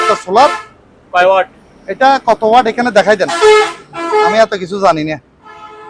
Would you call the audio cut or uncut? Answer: uncut